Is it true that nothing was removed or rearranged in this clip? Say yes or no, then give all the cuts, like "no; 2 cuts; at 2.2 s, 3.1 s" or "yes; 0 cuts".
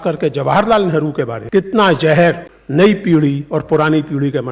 no; 2 cuts; at 1.4 s, 2.5 s